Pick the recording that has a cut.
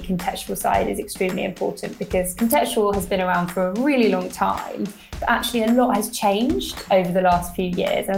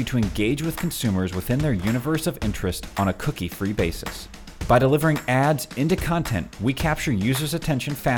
first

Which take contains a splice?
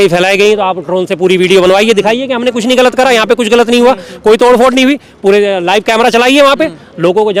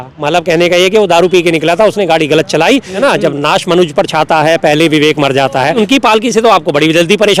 second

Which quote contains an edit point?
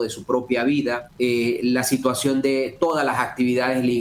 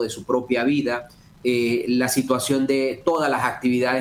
first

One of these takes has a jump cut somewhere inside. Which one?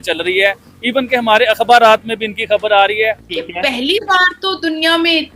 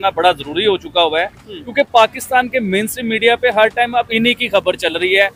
first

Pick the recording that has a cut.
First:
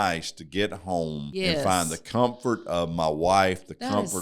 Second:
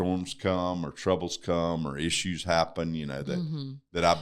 first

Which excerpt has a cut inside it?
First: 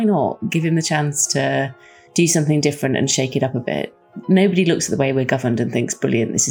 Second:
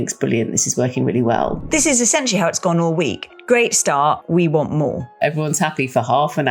second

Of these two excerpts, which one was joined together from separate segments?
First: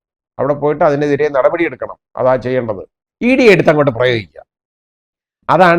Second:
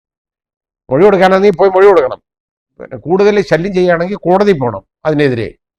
first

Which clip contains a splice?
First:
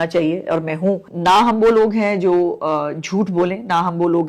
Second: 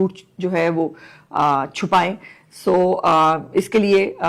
first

